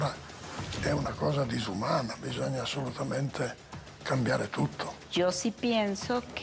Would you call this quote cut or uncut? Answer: cut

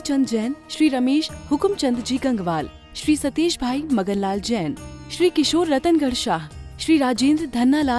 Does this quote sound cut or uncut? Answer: uncut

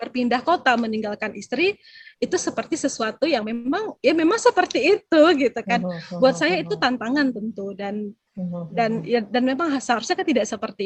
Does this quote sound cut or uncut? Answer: uncut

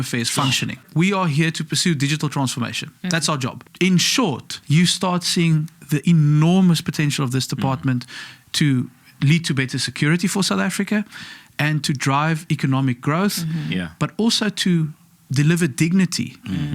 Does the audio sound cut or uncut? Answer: cut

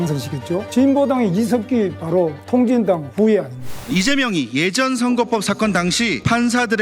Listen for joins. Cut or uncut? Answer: cut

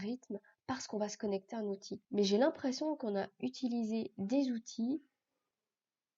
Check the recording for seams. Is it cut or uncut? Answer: cut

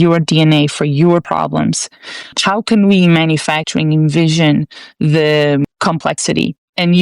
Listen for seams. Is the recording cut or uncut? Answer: cut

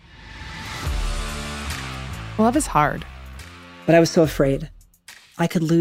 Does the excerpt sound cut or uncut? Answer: cut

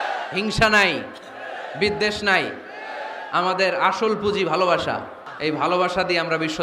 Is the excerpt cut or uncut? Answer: cut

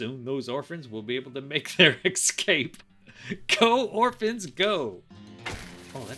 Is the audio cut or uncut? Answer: cut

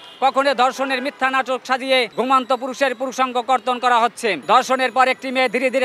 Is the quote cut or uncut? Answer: cut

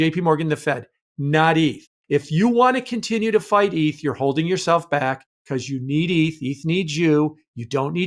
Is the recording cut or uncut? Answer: uncut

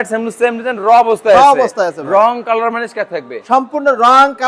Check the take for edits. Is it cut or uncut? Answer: uncut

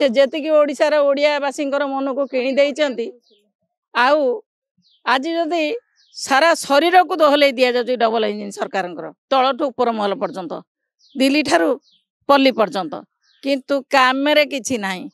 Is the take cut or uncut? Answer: uncut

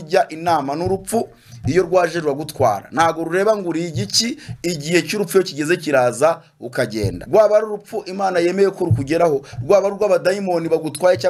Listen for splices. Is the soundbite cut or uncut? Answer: cut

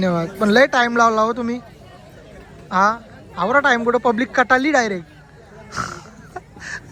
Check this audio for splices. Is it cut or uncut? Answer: uncut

